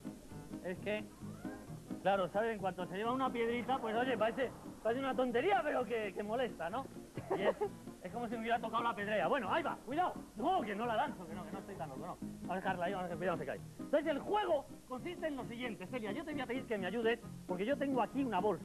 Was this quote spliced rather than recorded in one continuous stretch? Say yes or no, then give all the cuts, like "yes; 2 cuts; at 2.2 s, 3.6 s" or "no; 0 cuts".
no; 0 cuts